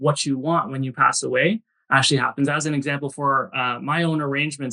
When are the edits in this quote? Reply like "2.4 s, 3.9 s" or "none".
none